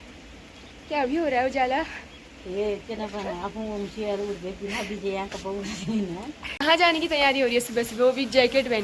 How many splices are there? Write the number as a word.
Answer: one